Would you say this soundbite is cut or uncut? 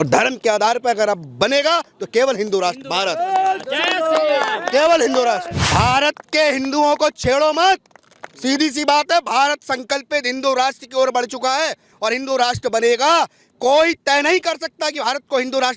cut